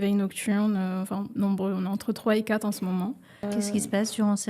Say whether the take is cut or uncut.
cut